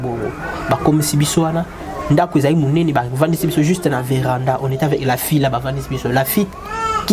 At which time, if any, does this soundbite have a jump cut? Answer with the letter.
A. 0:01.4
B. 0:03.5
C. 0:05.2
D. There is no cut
D